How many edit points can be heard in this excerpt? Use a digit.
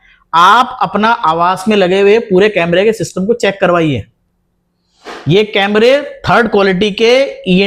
0